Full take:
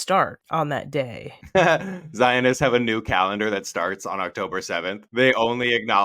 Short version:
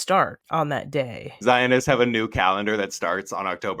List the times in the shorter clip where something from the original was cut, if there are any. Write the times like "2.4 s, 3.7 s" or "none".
1.2 s